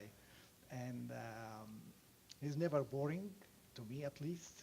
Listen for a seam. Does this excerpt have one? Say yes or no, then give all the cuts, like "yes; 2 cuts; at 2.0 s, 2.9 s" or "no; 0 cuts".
no; 0 cuts